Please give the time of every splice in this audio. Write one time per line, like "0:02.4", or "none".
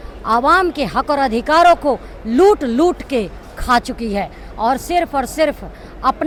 none